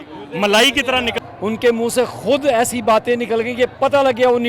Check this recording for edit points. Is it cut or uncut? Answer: cut